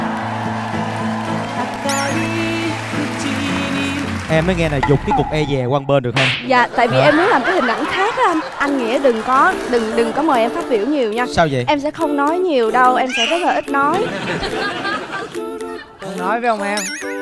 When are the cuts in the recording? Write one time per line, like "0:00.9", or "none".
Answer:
none

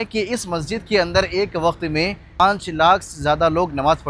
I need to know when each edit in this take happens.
none

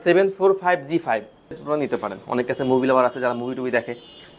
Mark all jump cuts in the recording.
0:01.6

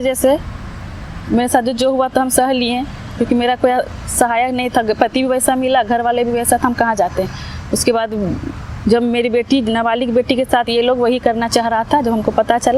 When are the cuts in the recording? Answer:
none

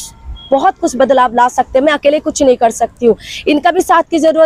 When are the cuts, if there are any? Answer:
none

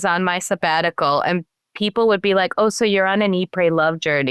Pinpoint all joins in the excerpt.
none

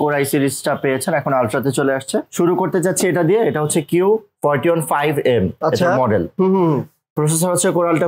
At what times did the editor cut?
none

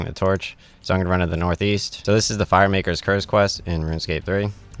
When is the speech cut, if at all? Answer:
0:01.9

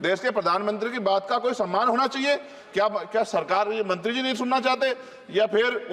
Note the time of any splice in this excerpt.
none

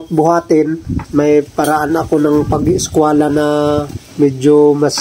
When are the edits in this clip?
0:01.0
0:04.0

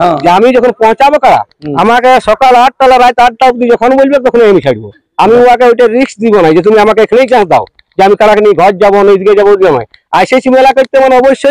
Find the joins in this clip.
none

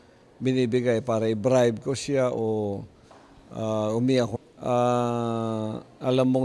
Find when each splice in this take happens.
none

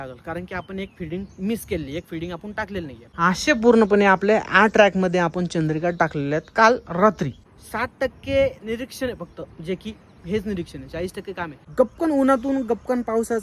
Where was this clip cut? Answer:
0:03.0
0:07.4
0:11.6

